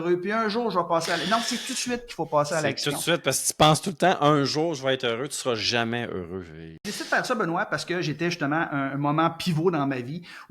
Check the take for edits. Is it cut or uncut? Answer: cut